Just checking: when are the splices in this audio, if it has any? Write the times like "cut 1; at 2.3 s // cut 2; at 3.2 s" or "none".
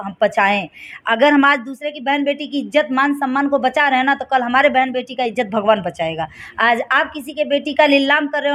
none